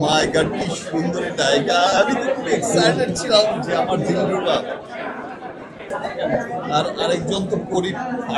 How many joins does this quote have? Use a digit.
1